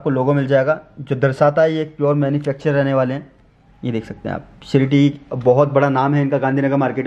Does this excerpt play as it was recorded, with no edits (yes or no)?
yes